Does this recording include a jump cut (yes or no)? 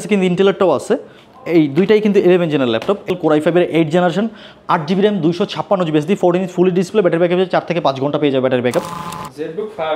yes